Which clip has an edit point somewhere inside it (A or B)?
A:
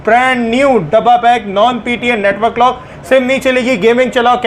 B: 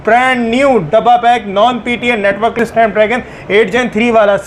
B